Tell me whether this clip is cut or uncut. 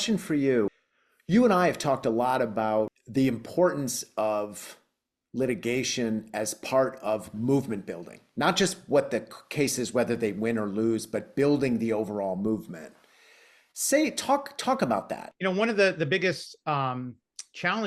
cut